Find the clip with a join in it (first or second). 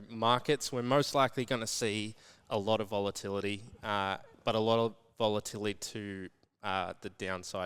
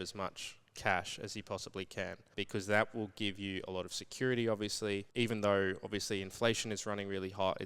second